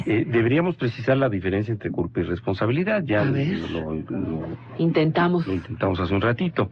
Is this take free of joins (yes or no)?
no